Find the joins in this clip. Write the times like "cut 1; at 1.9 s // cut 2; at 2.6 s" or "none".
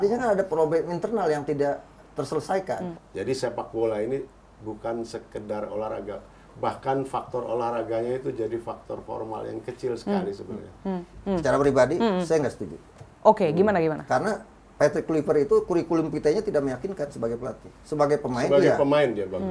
cut 1; at 3.0 s // cut 2; at 11.2 s